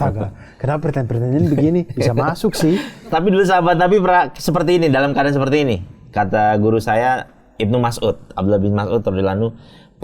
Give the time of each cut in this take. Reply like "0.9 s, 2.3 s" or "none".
none